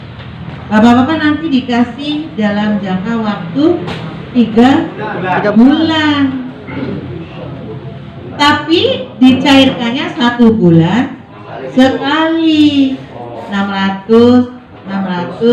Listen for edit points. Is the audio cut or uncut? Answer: uncut